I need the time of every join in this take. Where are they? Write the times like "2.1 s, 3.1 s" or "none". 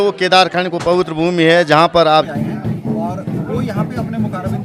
2.3 s

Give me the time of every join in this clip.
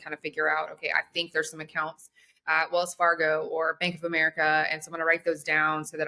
none

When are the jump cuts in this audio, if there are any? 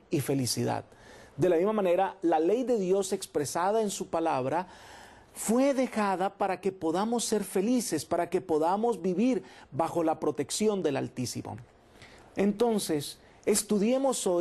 11.3 s

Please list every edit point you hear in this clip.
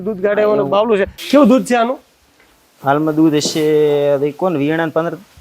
1.4 s

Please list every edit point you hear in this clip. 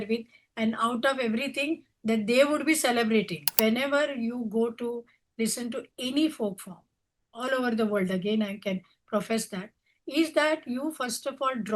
3.4 s

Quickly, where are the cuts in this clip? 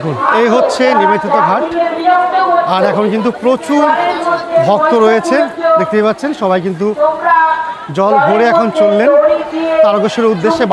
none

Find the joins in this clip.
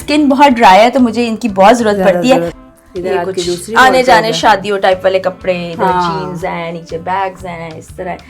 2.6 s

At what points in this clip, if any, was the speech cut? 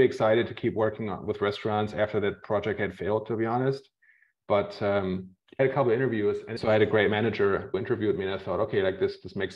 5.4 s, 6.5 s, 7.8 s

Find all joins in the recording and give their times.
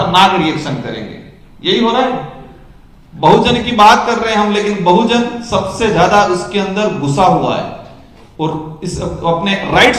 none

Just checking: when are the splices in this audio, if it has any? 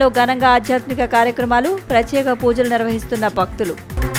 none

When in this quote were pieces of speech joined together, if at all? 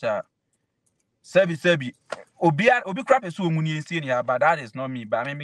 none

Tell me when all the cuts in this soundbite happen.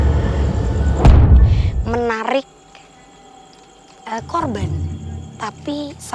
1.7 s

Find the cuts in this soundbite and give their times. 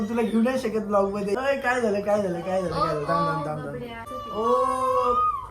1.3 s, 4.1 s

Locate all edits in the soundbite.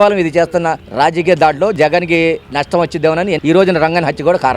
1.8 s, 3.4 s

